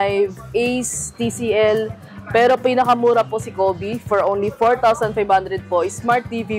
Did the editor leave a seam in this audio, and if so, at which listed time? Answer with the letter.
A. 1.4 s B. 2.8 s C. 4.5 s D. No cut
D